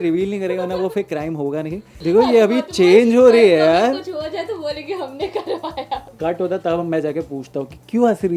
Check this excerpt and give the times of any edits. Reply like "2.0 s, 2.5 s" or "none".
1.9 s, 6.1 s